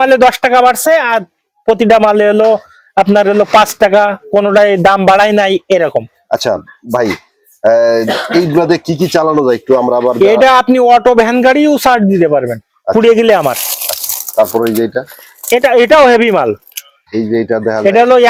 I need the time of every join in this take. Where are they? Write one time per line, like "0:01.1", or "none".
none